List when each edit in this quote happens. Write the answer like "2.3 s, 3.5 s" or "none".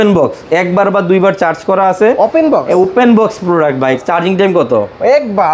4.0 s